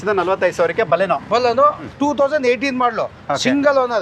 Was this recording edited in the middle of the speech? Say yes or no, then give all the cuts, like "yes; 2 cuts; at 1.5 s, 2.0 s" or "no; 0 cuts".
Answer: yes; 1 cut; at 1.9 s